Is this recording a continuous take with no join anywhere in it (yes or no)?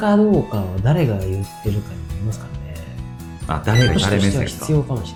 yes